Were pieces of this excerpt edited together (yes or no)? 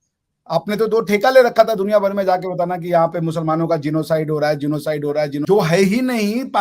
yes